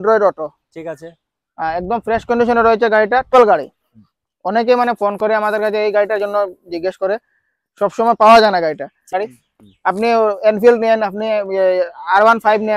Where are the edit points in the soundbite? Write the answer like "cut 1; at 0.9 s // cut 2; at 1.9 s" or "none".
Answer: cut 1; at 3.3 s // cut 2; at 9.1 s